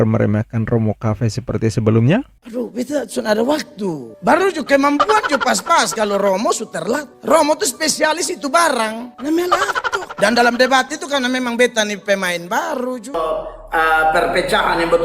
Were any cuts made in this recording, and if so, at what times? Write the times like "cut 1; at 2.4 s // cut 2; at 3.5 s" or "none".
cut 1; at 13.2 s

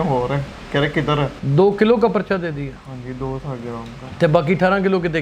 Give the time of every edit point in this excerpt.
cut 1; at 1.4 s

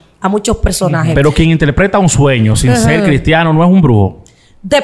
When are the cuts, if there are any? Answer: cut 1; at 1.1 s

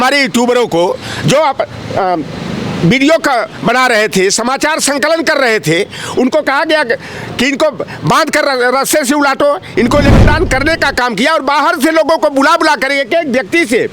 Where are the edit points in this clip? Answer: cut 1; at 10.2 s

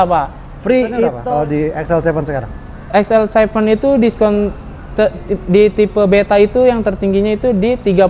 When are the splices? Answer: cut 1; at 1.2 s

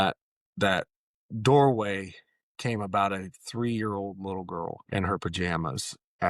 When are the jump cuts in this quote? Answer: cut 1; at 4.8 s

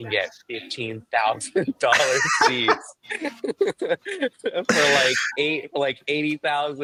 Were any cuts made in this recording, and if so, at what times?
none

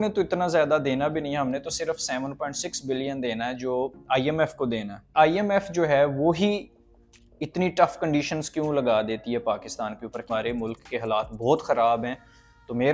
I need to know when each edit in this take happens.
cut 1; at 5.1 s // cut 2; at 10.3 s

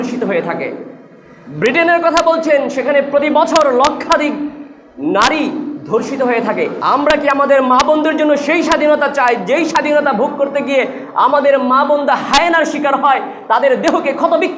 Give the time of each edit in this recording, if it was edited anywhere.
cut 1; at 6.8 s

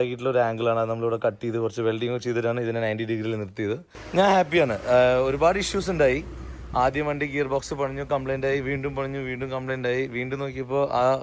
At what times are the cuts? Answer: cut 1; at 3.9 s

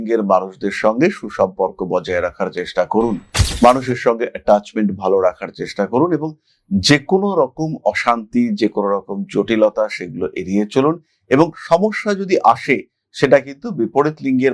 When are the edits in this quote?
none

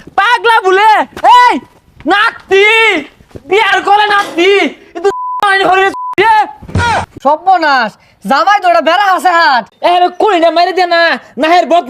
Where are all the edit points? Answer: cut 1; at 6.9 s // cut 2; at 9.7 s

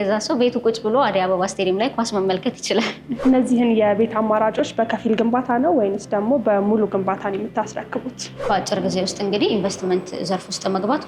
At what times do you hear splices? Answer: cut 1; at 3.1 s // cut 2; at 8.2 s

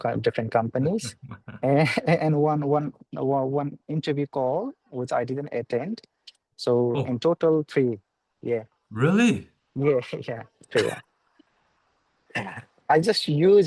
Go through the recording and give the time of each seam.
none

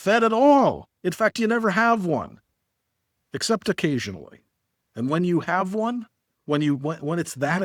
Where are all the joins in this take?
none

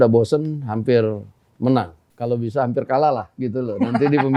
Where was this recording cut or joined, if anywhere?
none

